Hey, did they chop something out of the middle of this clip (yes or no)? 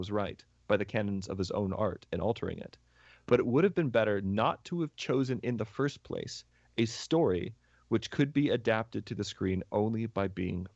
no